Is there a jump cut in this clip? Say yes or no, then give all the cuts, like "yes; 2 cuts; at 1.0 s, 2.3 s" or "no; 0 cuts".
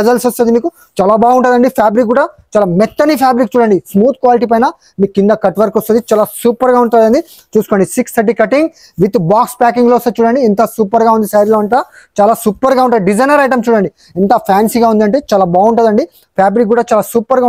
no; 0 cuts